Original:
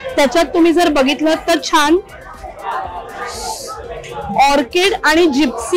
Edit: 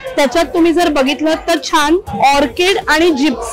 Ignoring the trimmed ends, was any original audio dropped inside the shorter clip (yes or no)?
yes